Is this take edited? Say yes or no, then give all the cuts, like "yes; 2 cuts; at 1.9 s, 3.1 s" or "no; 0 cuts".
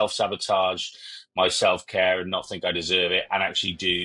no; 0 cuts